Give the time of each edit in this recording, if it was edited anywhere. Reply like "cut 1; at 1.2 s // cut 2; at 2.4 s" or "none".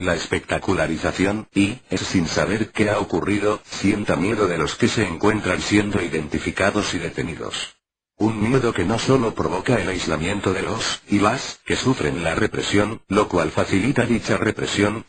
none